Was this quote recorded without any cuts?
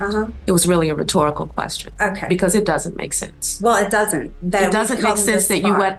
yes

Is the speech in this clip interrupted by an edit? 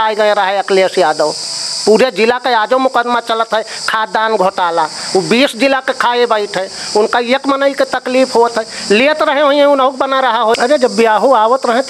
yes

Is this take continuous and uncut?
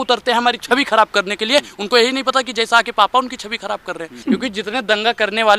no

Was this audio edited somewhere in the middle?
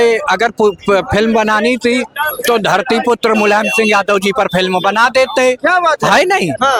no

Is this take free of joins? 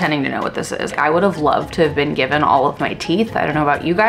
no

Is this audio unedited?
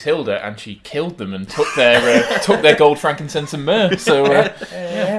yes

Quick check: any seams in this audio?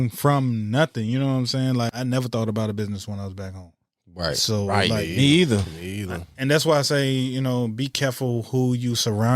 yes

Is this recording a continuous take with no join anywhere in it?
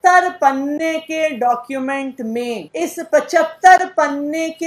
no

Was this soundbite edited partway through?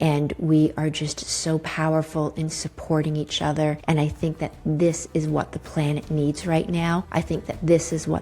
yes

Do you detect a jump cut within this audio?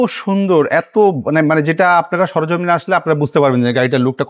no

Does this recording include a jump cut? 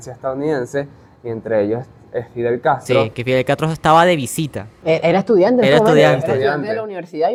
no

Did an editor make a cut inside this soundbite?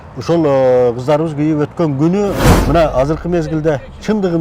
yes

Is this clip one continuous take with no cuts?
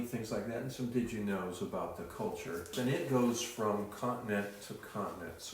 no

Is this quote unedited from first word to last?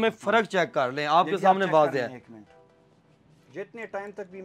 yes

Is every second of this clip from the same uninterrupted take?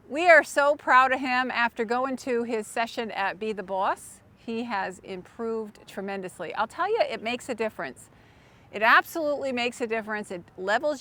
yes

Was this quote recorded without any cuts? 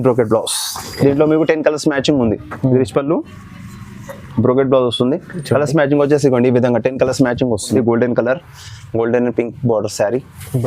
no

